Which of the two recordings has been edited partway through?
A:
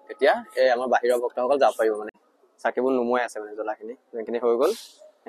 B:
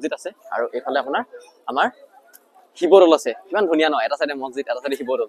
A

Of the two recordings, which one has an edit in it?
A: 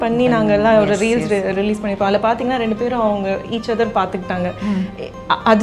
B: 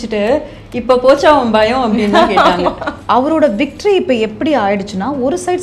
B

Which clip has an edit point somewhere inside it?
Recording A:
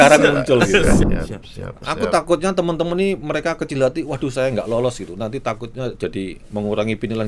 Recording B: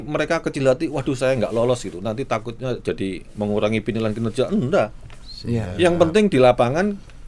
A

